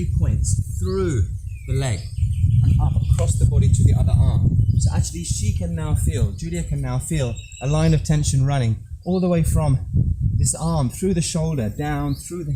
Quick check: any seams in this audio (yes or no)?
no